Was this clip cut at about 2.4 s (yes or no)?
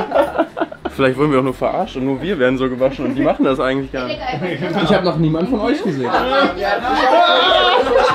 no